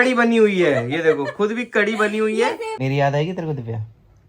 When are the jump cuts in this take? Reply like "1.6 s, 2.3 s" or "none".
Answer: 2.7 s